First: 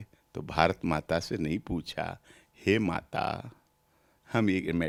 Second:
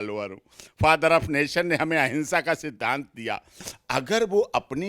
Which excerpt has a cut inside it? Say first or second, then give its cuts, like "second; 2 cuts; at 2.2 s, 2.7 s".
second; 1 cut; at 3.7 s